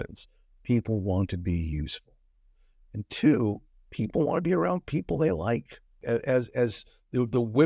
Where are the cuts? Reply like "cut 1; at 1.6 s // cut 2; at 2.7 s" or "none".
cut 1; at 6.0 s